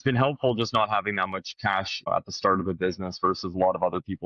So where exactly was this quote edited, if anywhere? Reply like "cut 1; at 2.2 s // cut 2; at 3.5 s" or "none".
cut 1; at 2.1 s

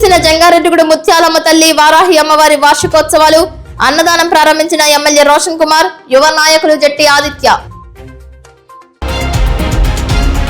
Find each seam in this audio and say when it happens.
cut 1; at 9.0 s

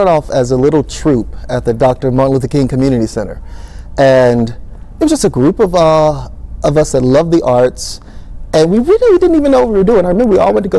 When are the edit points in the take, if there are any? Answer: none

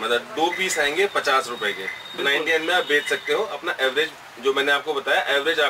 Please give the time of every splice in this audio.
none

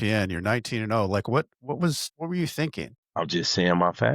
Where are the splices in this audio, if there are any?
cut 1; at 2.1 s // cut 2; at 3.0 s

